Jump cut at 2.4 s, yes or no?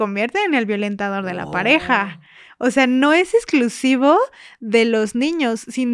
no